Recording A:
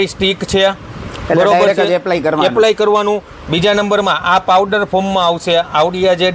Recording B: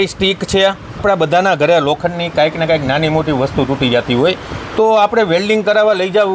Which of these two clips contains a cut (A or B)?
B